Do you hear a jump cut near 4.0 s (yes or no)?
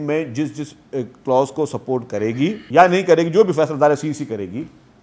no